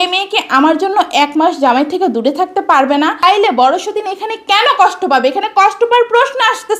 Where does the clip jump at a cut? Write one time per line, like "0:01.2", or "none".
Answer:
0:03.2